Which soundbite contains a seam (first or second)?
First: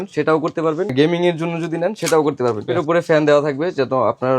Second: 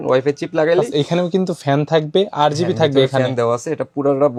first